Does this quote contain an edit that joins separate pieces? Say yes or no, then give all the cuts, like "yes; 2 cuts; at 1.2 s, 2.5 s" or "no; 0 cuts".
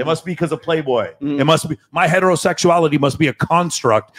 no; 0 cuts